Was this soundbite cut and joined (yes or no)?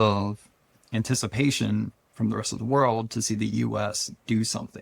no